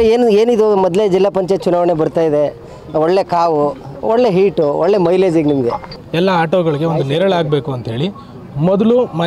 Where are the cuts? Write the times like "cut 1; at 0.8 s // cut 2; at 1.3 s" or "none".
cut 1; at 6.0 s